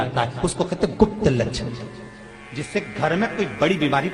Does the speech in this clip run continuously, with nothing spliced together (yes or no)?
yes